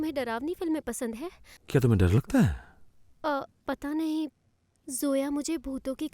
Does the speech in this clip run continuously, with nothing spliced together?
yes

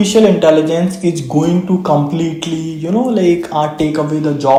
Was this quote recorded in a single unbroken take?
yes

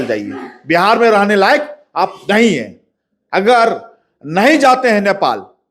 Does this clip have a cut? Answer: no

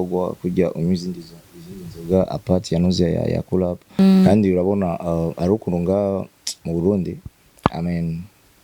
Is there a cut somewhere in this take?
yes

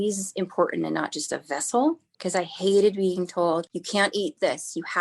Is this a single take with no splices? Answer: no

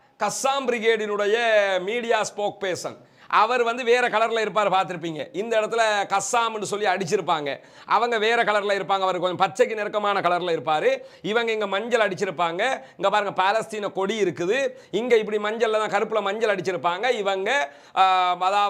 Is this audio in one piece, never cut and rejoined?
yes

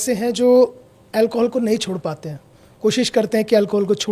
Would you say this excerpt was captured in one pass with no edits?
yes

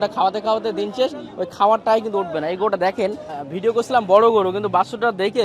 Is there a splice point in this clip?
yes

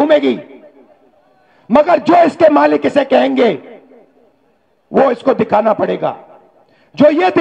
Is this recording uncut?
yes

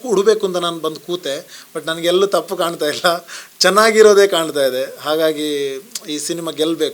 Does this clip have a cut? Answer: no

